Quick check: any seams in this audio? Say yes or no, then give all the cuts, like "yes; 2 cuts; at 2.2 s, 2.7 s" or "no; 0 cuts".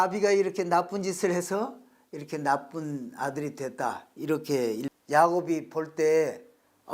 yes; 1 cut; at 4.9 s